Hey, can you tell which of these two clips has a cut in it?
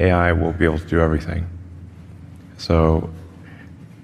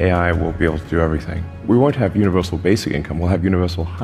second; 1 cut; at 1.6 s

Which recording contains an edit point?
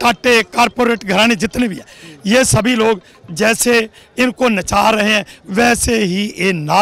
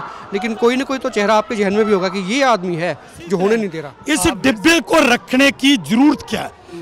second; 1 cut; at 3.9 s

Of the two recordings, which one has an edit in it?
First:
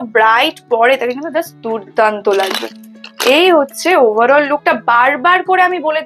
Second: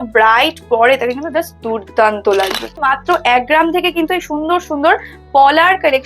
second; 1 cut; at 2.9 s

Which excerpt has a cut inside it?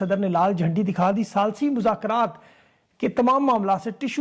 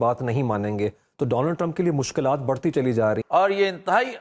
second; 1 cut; at 3.3 s

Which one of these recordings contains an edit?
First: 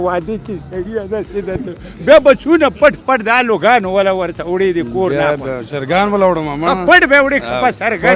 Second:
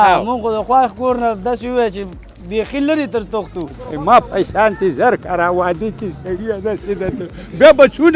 second; 1 cut; at 3.6 s

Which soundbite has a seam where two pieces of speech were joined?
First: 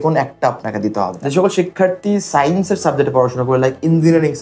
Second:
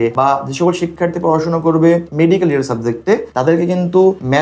first; 1 cut; at 1.1 s

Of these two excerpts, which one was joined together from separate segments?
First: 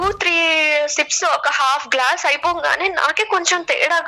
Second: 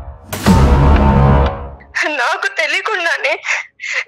second; 1 cut; at 1.7 s

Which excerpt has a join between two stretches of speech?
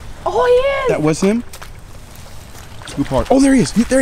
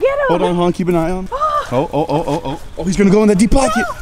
second; 2 cuts; at 1.3 s, 2.6 s

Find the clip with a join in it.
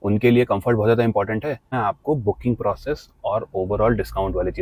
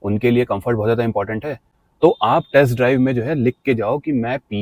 first; 1 cut; at 1.8 s

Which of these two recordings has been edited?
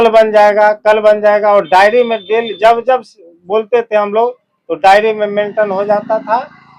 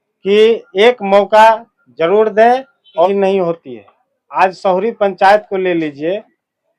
second; 1 cut; at 2.9 s

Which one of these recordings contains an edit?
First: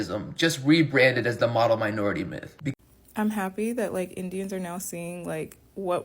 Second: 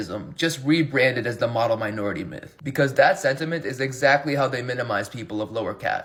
first; 1 cut; at 2.6 s

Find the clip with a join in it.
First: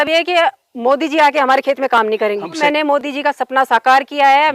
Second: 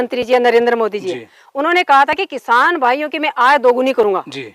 first; 1 cut; at 2.6 s

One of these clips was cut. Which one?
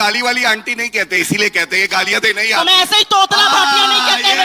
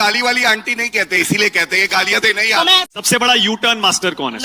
second; 1 cut; at 2.9 s

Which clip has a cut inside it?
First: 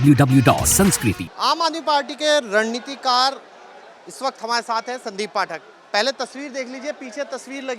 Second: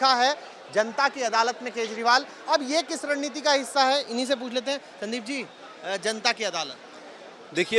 first; 1 cut; at 1.3 s

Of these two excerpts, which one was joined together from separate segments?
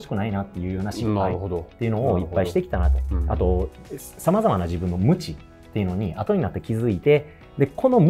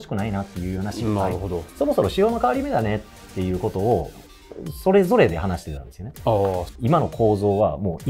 second; 2 cuts; at 1.6 s, 6.7 s

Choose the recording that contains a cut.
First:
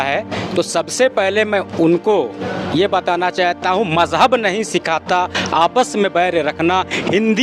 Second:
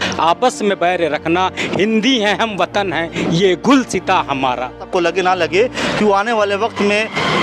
second; 1 cut; at 4.8 s

